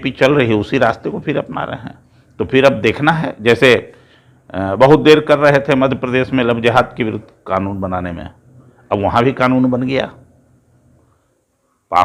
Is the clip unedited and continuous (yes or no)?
yes